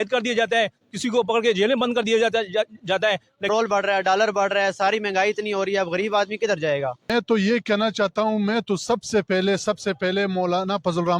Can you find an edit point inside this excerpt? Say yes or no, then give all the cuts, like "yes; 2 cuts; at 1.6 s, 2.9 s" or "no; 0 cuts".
yes; 2 cuts; at 3.5 s, 7.0 s